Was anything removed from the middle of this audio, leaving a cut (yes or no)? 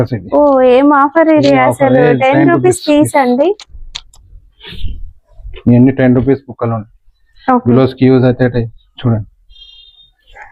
no